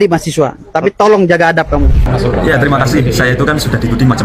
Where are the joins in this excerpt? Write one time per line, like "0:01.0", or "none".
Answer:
0:02.1